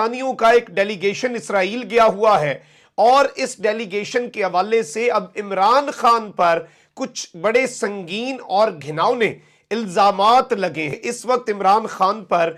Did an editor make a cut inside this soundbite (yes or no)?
no